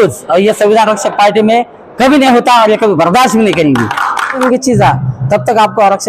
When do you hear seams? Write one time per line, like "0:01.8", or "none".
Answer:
0:04.4